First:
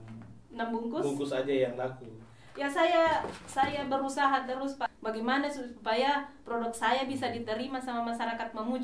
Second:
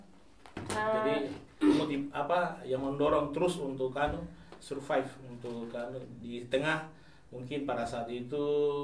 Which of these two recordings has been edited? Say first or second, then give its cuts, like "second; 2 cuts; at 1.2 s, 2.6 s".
first; 1 cut; at 4.9 s